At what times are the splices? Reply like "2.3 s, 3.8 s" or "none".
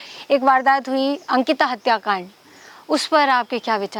none